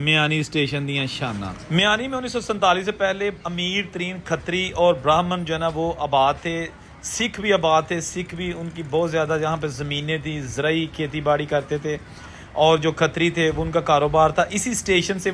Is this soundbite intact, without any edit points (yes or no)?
no